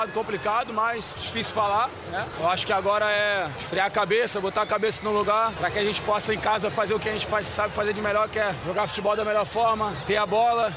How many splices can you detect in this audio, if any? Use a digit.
6